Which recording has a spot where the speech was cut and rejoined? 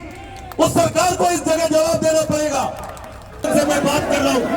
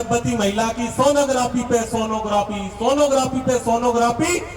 first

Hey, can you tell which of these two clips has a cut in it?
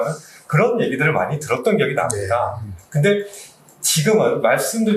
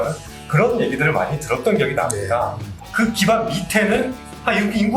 second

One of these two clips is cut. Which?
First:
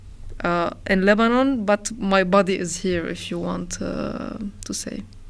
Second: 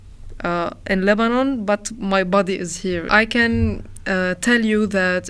second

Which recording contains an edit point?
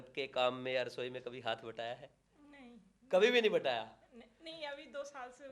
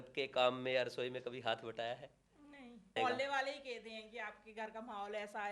second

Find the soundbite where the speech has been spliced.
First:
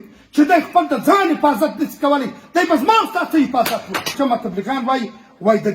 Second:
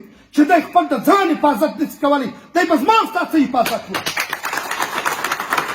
first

